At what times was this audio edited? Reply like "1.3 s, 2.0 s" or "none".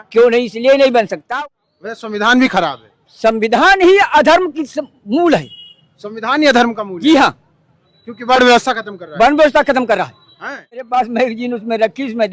1.2 s, 10.8 s